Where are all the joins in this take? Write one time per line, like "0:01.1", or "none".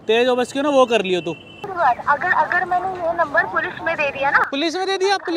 0:01.6